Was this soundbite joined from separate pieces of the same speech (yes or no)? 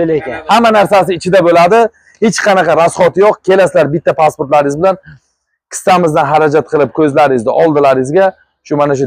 no